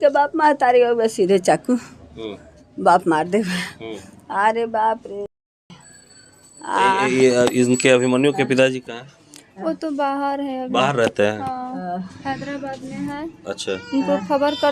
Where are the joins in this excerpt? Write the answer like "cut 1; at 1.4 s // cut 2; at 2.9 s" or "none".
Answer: none